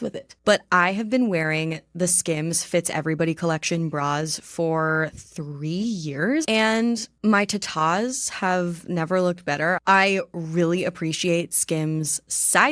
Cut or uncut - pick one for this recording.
cut